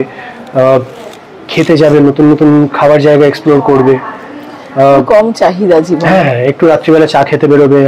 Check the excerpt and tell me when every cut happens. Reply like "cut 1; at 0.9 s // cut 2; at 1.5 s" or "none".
none